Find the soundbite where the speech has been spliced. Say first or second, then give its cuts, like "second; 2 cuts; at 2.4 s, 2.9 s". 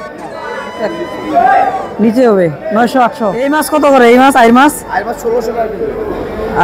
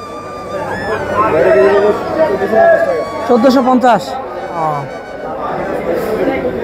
first; 1 cut; at 3.6 s